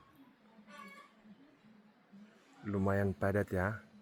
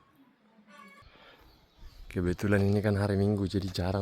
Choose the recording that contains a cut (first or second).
second